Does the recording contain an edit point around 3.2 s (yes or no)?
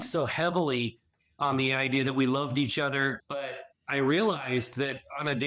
yes